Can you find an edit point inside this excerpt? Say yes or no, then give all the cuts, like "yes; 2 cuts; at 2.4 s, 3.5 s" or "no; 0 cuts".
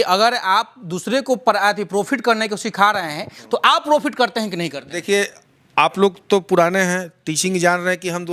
no; 0 cuts